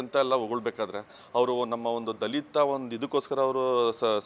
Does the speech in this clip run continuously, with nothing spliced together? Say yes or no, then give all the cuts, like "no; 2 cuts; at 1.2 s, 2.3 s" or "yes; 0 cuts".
yes; 0 cuts